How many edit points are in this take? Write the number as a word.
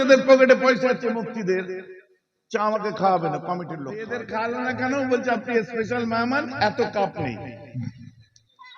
one